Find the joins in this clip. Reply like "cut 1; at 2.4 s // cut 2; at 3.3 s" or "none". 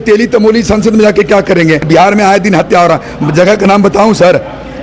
cut 1; at 1.9 s